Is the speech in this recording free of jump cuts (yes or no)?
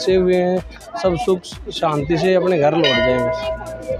yes